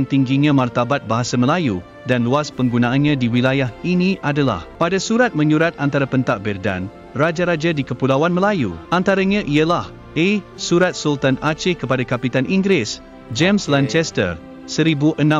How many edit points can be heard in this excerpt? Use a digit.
2